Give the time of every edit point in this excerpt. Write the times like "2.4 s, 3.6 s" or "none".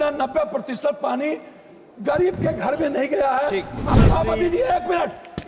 3.9 s